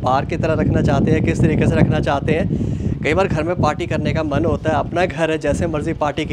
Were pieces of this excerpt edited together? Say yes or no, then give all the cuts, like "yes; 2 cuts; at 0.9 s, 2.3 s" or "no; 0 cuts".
no; 0 cuts